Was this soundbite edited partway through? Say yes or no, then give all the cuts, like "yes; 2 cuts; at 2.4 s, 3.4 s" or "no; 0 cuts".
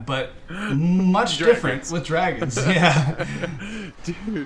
no; 0 cuts